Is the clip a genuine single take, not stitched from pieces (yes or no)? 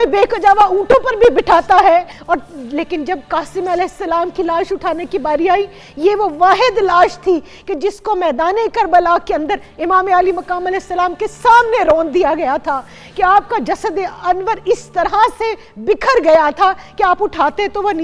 no